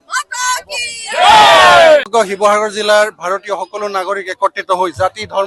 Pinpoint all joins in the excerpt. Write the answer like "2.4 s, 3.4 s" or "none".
2.1 s